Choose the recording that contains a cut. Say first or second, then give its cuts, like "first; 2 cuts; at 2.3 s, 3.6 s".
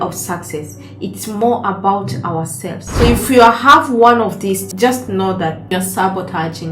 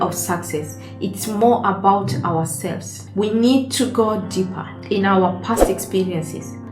first; 2 cuts; at 2.8 s, 5.7 s